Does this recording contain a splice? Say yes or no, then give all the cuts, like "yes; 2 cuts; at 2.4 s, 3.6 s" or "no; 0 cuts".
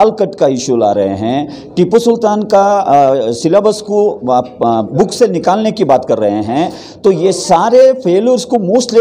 no; 0 cuts